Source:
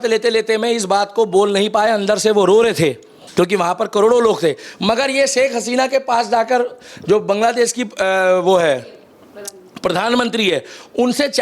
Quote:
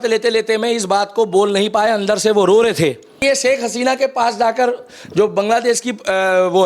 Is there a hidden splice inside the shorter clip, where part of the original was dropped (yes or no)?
yes